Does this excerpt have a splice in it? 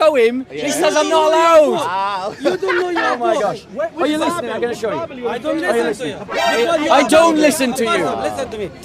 no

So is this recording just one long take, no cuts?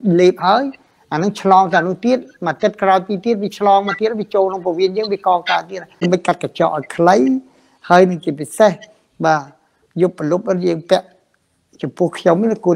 no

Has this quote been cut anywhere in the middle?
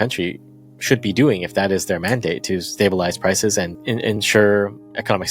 yes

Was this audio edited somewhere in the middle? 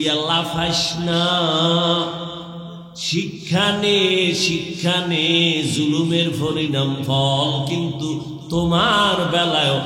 no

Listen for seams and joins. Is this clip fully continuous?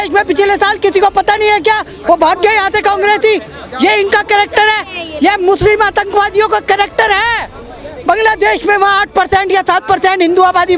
yes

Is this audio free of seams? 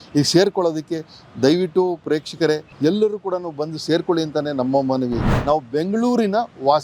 no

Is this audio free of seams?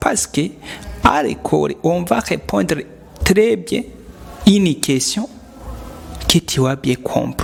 yes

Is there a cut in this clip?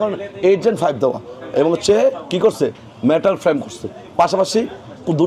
no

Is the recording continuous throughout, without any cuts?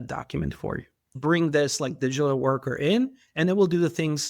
no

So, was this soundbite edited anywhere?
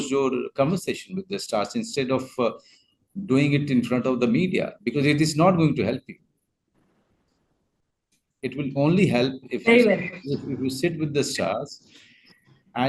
no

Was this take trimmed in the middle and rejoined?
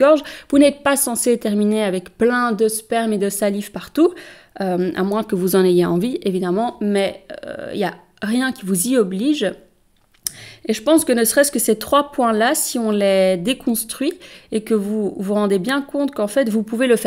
no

